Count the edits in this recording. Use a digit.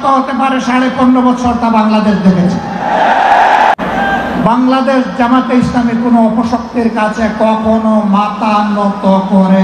1